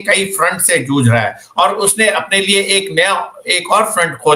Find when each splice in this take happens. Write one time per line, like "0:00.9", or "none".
none

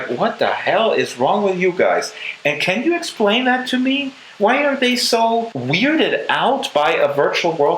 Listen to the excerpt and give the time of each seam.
0:05.6

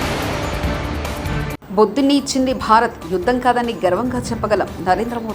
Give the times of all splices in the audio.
0:01.5

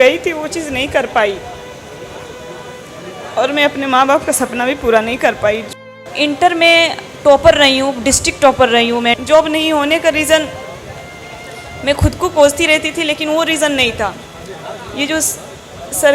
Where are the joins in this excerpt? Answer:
0:06.1
0:09.2

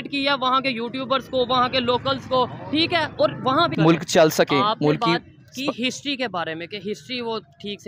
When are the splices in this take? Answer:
0:03.7

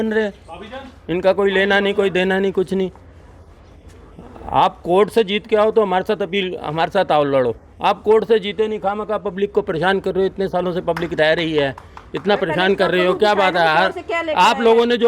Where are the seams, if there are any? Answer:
none

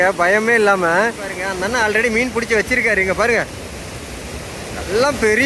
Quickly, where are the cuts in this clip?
0:01.5

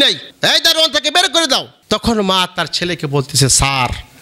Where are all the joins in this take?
0:01.7

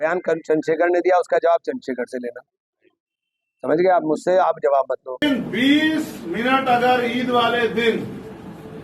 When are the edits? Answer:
0:05.2

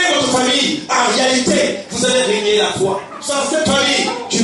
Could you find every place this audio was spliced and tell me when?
0:03.1

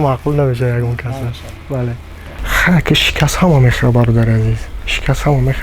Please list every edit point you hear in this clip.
0:02.4

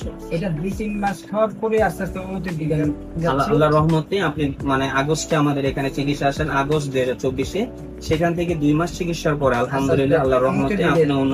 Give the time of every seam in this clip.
none

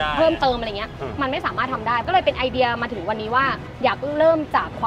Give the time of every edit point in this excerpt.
0:02.1
0:03.7

